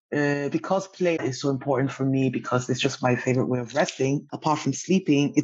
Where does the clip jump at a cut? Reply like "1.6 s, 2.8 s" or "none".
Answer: 1.2 s, 4.3 s